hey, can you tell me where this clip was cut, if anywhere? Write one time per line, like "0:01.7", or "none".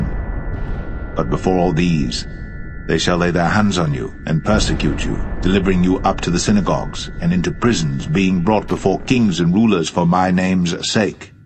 none